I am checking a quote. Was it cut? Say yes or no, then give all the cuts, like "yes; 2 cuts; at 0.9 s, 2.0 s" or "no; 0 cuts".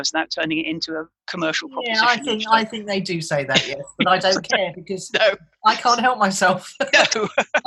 no; 0 cuts